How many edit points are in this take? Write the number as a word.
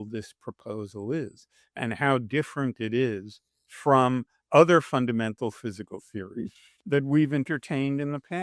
zero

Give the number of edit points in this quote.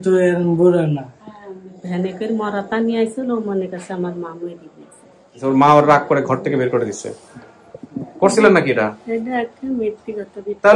two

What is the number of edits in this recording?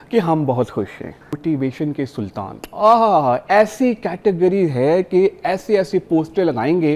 one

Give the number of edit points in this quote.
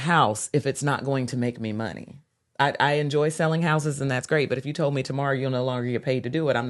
zero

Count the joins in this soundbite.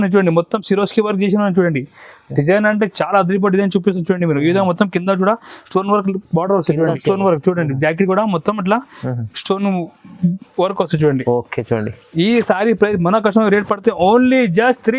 zero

